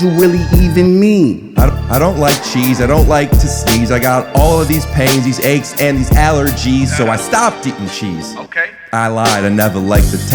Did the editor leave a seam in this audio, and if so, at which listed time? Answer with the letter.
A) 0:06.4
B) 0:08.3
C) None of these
C